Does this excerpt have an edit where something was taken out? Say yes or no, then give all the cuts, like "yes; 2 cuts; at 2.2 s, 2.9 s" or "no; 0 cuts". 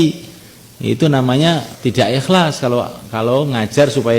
yes; 1 cut; at 1.7 s